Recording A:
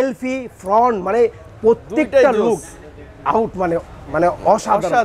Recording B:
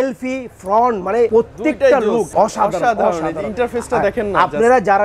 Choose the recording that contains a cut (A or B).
B